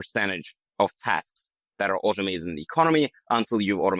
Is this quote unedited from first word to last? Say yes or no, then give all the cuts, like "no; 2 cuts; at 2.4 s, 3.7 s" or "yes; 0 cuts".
yes; 0 cuts